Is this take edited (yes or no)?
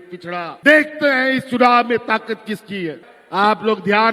yes